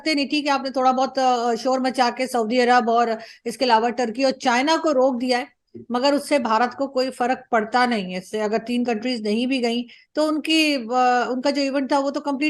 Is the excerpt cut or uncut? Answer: uncut